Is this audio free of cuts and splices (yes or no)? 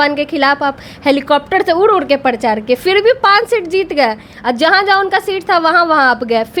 yes